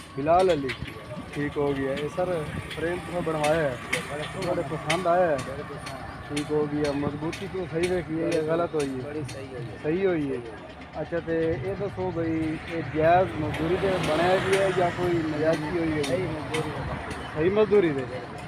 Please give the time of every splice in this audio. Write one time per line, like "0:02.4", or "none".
none